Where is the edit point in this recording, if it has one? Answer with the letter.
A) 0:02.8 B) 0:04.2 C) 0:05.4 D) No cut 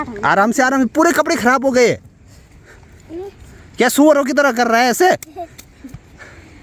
D